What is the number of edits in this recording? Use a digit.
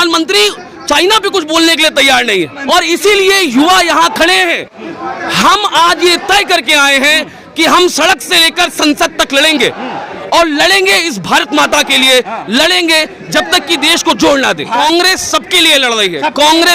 2